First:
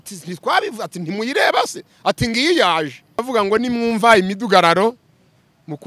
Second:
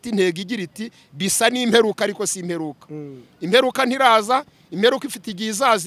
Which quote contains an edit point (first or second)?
first